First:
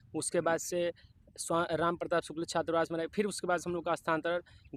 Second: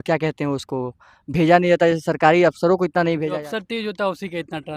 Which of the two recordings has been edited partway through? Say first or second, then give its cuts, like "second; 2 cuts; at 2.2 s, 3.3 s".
second; 1 cut; at 3.3 s